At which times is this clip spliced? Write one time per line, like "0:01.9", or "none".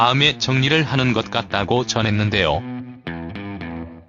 0:01.3